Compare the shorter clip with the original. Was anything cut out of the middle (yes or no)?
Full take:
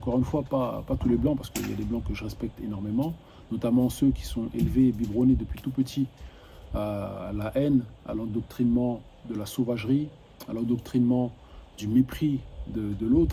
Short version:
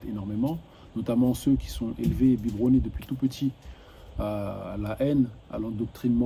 no